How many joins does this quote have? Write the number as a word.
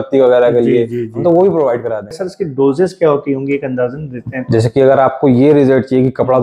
one